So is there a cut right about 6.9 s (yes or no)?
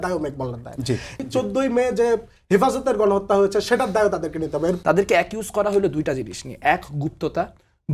no